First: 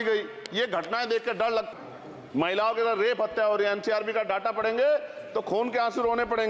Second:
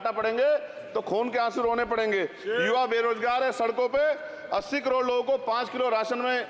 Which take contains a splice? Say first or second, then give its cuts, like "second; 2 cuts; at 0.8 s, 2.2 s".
first; 1 cut; at 1.7 s